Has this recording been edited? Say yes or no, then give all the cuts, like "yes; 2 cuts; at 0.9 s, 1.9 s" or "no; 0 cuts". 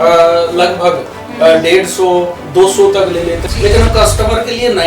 yes; 1 cut; at 3.4 s